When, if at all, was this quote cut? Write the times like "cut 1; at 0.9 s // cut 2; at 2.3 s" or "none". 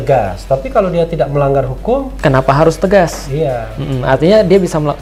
none